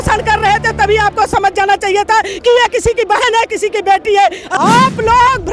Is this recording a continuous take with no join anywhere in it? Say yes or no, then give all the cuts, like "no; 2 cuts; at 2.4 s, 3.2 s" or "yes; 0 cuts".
no; 1 cut; at 4.4 s